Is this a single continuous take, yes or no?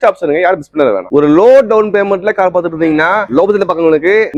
yes